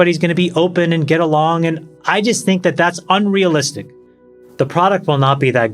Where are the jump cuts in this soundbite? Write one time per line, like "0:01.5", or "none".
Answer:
0:03.9